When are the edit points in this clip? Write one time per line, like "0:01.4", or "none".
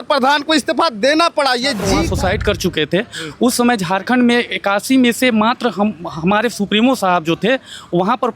0:02.0